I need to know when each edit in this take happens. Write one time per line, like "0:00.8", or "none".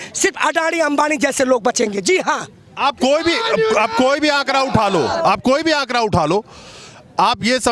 none